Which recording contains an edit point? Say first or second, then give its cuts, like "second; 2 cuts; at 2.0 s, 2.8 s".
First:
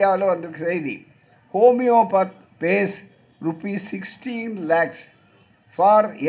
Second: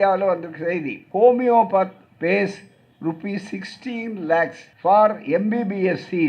second; 2 cuts; at 1.0 s, 4.6 s